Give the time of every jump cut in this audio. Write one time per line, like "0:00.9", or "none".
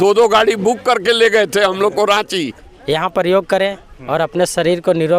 0:02.7